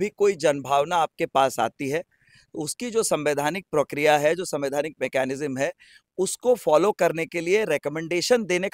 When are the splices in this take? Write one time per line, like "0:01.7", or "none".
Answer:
none